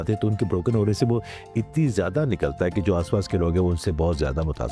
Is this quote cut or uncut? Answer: uncut